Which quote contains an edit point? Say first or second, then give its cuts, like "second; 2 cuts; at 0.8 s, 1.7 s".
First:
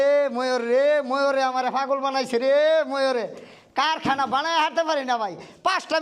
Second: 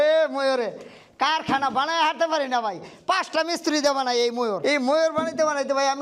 second; 1 cut; at 4.6 s